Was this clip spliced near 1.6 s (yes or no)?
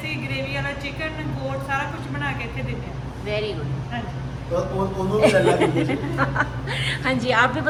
no